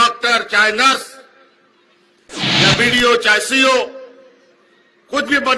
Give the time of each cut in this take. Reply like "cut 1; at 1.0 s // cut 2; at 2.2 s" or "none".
cut 1; at 2.6 s